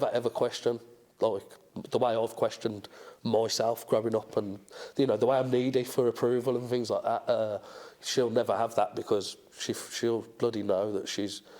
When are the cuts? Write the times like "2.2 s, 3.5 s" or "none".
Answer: none